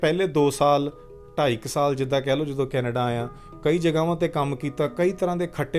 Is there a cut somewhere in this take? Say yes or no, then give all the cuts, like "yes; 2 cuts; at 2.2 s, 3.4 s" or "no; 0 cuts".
no; 0 cuts